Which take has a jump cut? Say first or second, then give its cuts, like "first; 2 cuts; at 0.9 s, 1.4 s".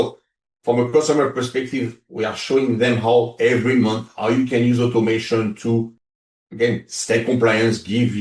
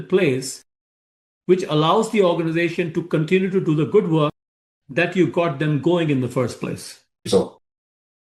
second; 1 cut; at 7.3 s